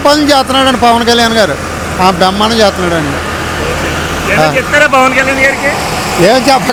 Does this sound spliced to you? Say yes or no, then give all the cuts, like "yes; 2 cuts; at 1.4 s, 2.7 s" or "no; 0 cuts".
no; 0 cuts